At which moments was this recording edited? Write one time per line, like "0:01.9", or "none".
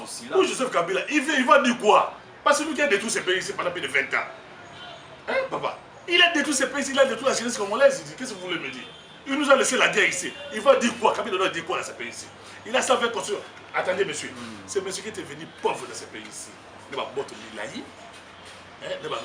none